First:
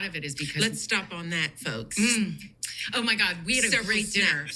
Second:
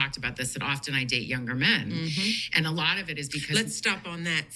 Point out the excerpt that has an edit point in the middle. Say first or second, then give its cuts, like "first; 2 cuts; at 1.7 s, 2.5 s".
first; 1 cut; at 2.8 s